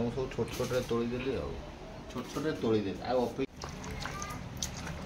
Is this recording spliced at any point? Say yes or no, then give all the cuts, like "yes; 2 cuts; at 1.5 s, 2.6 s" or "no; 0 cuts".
yes; 1 cut; at 3.5 s